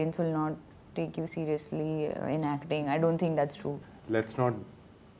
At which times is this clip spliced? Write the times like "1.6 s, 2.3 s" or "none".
3.8 s